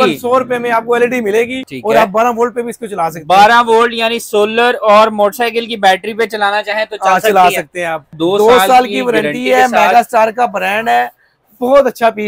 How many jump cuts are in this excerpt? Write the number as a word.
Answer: two